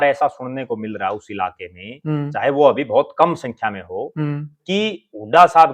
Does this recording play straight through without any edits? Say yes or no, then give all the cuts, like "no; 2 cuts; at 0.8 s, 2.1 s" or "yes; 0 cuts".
yes; 0 cuts